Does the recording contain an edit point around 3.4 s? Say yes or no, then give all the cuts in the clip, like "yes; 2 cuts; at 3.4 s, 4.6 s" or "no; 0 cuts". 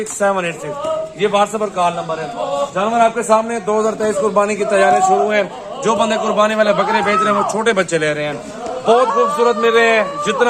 no; 0 cuts